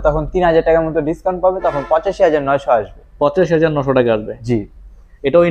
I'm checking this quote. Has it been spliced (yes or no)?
no